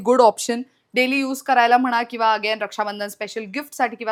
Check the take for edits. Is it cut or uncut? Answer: uncut